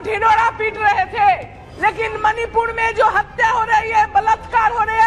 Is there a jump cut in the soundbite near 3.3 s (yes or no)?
no